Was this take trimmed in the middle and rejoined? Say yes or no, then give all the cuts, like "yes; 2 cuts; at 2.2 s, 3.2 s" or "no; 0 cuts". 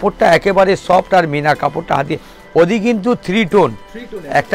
no; 0 cuts